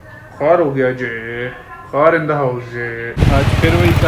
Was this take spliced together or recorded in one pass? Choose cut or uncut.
cut